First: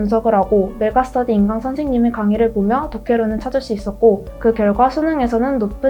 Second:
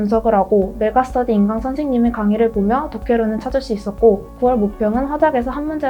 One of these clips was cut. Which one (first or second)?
first